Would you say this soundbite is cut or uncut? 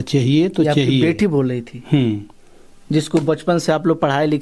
uncut